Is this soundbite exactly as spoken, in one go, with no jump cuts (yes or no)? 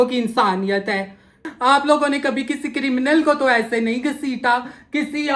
no